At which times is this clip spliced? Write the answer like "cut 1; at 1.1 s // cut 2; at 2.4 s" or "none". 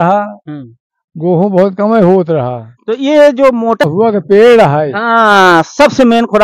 cut 1; at 3.8 s